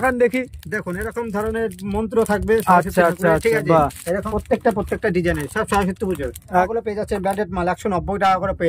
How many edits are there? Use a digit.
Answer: 2